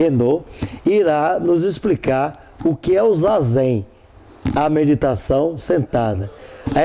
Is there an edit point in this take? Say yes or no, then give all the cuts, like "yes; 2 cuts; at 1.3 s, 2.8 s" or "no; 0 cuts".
no; 0 cuts